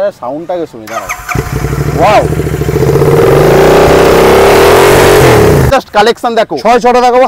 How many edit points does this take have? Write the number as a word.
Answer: one